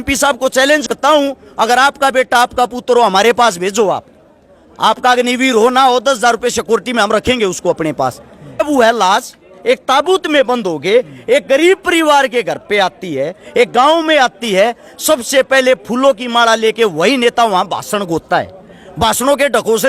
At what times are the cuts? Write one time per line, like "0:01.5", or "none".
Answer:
0:00.9
0:08.6